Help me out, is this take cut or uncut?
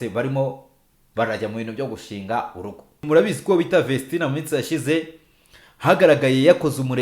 cut